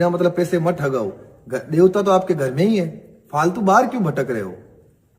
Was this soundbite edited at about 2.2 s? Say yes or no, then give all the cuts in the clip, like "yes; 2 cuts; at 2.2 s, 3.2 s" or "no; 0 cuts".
yes; 1 cut; at 2.2 s